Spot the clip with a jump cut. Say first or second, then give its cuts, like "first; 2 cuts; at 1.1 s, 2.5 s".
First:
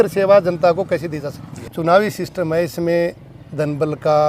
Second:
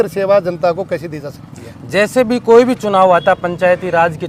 first; 1 cut; at 1.6 s